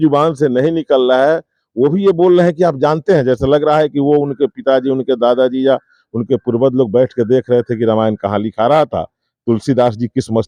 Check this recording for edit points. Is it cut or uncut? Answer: uncut